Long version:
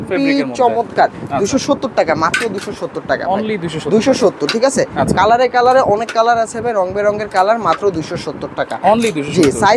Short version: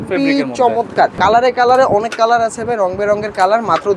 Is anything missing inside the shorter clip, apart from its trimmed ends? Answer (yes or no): yes